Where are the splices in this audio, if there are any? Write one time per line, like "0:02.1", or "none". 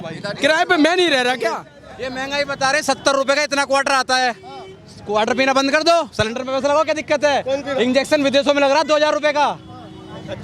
0:01.7